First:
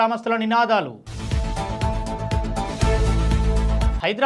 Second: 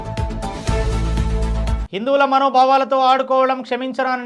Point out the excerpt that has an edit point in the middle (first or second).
second